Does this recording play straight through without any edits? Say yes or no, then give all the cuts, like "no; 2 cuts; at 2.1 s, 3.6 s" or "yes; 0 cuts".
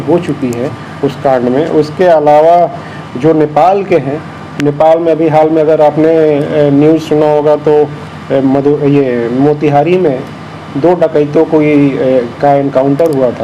yes; 0 cuts